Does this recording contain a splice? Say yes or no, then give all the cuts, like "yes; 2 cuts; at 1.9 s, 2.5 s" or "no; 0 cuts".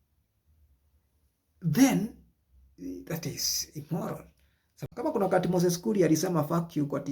yes; 1 cut; at 4.8 s